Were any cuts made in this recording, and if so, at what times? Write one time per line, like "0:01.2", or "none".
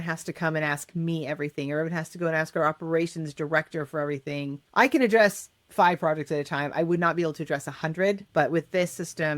0:04.6
0:08.2